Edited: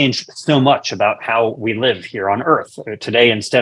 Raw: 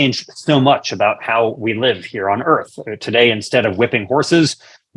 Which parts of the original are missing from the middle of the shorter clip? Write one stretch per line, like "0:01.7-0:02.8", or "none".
none